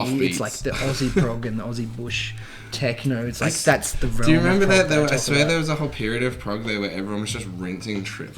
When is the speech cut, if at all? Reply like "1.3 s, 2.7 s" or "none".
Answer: none

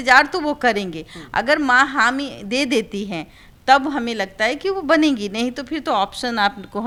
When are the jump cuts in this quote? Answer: none

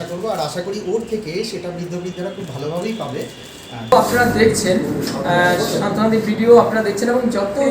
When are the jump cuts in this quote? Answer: 3.9 s

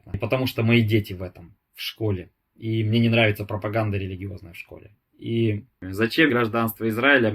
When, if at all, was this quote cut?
6.2 s

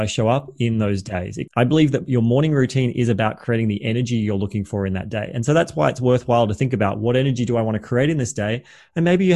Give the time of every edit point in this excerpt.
1.3 s

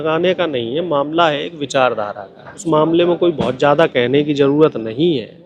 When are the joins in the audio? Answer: 2.6 s

